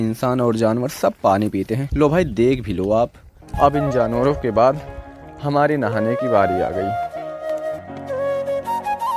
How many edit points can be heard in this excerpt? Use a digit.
2